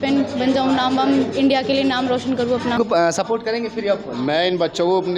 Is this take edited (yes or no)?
yes